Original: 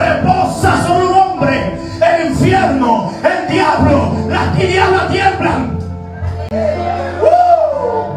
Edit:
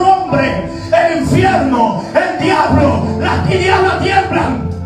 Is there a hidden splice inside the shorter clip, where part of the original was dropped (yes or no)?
no